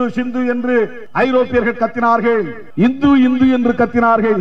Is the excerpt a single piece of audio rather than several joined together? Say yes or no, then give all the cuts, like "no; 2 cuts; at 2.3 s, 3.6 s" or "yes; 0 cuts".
no; 2 cuts; at 1.0 s, 2.6 s